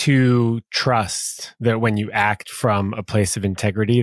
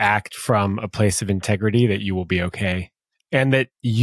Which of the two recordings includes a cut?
second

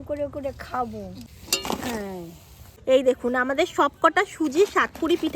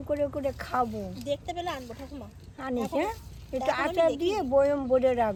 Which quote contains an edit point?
first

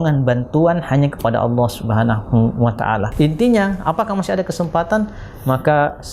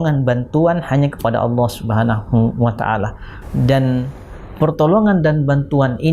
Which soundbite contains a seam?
first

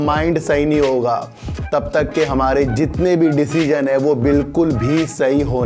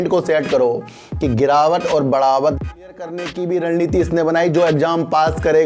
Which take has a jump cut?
second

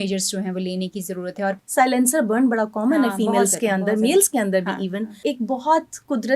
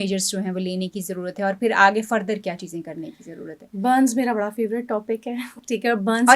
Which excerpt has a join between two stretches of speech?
first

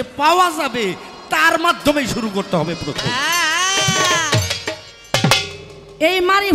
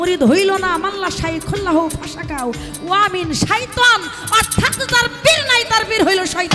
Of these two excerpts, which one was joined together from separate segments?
first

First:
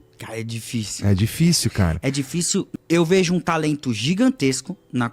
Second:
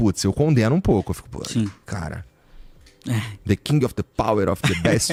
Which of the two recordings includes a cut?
first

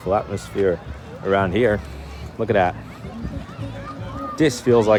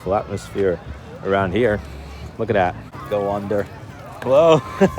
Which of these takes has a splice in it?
second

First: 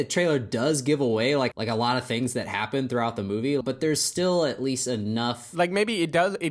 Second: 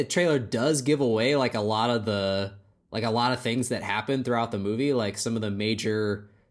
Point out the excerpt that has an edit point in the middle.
first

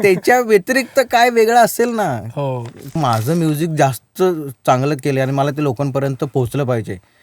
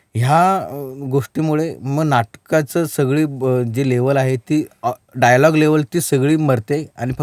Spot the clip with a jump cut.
first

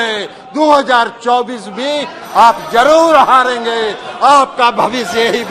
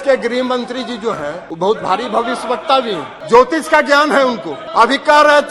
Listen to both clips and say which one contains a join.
second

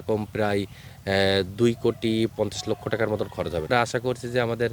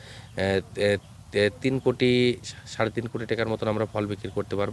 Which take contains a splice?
first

